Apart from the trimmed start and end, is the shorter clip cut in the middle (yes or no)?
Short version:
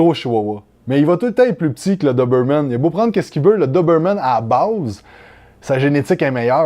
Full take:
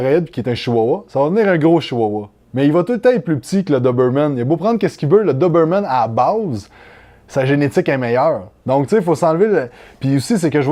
no